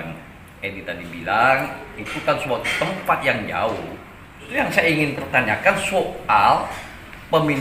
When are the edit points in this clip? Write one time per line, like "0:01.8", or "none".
0:04.3

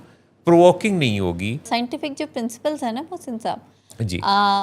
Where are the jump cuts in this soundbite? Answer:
0:01.7

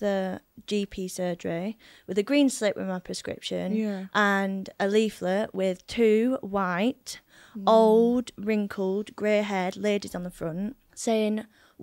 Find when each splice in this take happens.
0:10.9

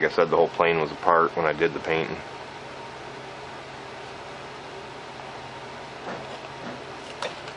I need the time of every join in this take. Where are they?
0:04.1

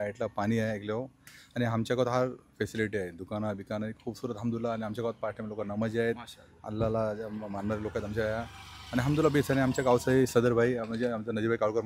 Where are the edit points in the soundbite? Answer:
none

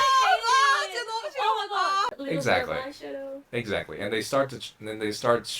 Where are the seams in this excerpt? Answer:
0:02.1

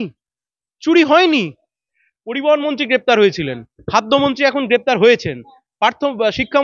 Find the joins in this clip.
0:01.8

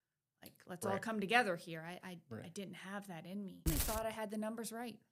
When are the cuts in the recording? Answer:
0:03.7

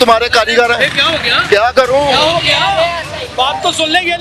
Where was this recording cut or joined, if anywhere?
none

